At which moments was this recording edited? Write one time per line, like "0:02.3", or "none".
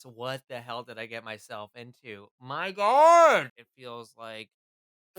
0:03.6